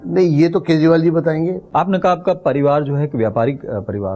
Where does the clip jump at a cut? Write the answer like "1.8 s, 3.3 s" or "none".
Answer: 1.6 s